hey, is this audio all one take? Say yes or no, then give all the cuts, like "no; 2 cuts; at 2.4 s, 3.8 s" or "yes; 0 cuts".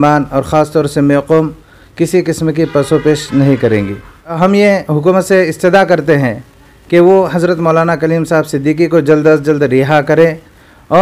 no; 1 cut; at 4.3 s